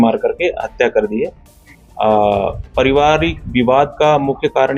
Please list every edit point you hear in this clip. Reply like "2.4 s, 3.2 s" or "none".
none